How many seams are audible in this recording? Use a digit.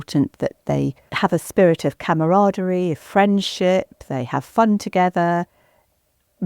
1